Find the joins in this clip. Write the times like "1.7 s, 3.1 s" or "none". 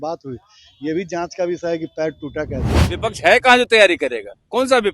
2.9 s